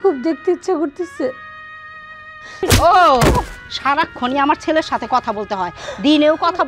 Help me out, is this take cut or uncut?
cut